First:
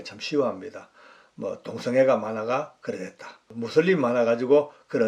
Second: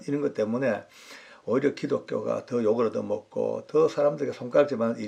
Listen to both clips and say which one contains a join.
first; 1 cut; at 3.5 s

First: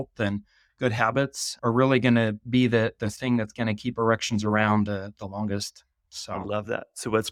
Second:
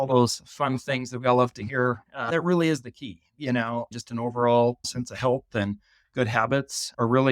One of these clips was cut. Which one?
second; 1 cut; at 2.3 s

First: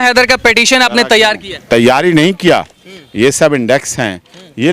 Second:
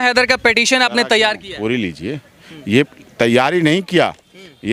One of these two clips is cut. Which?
first; 1 cut; at 1.5 s

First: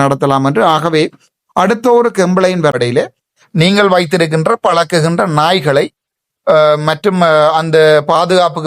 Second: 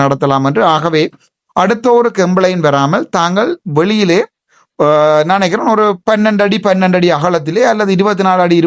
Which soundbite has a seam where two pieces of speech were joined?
first; 1 cut; at 2.7 s

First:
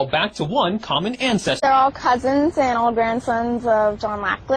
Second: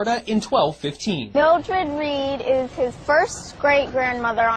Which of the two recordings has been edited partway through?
first; 1 cut; at 1.6 s

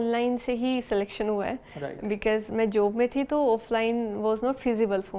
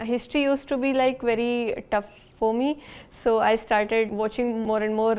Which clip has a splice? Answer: second; 1 cut; at 4.3 s

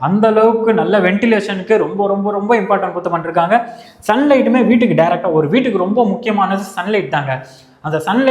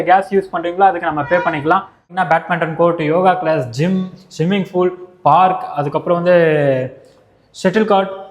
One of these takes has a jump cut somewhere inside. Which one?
second; 1 cut; at 2.1 s

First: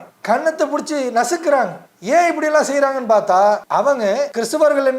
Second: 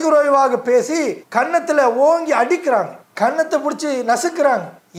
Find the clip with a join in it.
first; 1 cut; at 4.0 s

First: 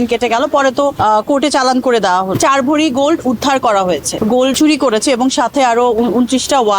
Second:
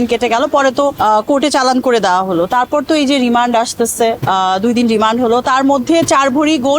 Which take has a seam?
first; 2 cuts; at 2.4 s, 4.5 s

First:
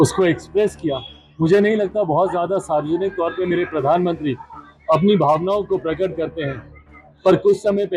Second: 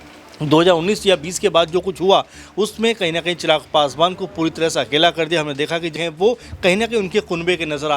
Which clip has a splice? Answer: second; 1 cut; at 5.9 s

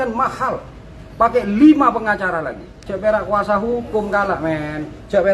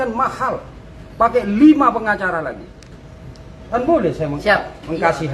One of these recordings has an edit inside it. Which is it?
first; 1 cut; at 2.8 s

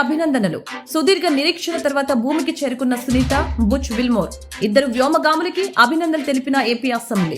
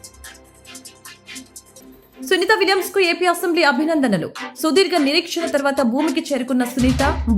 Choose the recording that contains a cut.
second; 1 cut; at 2.3 s

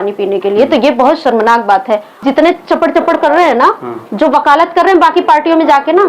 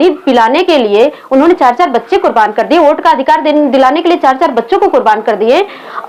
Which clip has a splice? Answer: first; 1 cut; at 2.1 s

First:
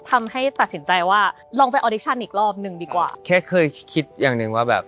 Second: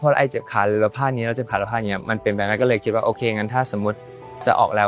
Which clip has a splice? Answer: first; 2 cuts; at 1.4 s, 3.2 s

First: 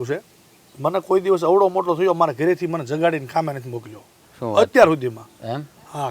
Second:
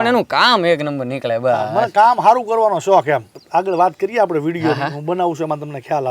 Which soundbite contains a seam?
second; 1 cut; at 3.3 s

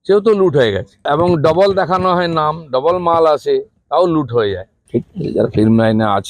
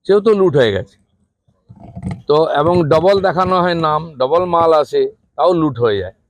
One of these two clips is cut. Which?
first; 2 cuts; at 1.0 s, 4.7 s

